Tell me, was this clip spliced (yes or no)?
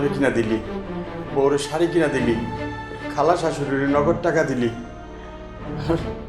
no